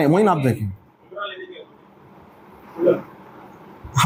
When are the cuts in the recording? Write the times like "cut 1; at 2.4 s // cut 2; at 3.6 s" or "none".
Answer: none